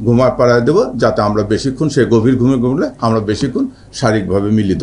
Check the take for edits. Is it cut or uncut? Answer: uncut